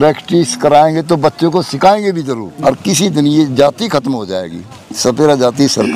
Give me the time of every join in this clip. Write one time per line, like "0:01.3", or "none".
0:02.6